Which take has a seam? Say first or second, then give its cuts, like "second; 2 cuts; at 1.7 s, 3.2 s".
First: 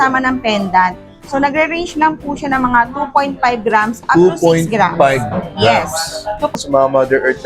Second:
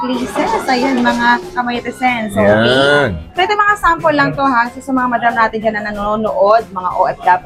first; 1 cut; at 6.5 s